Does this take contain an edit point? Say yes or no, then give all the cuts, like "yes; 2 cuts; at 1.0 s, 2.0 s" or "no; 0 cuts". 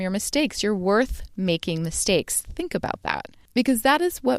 yes; 1 cut; at 3.3 s